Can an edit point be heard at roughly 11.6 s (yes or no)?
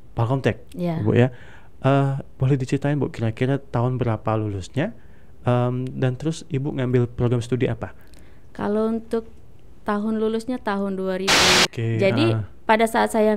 yes